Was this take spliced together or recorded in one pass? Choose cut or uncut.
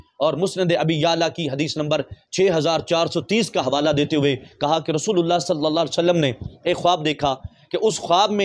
uncut